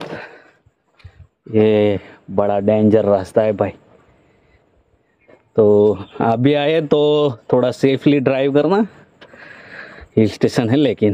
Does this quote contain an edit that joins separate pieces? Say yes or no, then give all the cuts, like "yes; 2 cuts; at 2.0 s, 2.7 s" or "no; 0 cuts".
no; 0 cuts